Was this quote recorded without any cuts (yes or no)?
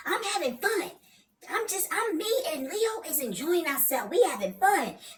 yes